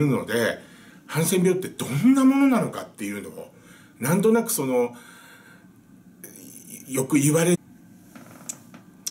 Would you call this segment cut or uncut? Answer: uncut